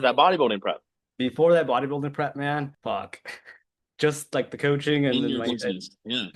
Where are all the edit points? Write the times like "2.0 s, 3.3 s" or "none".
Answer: 2.8 s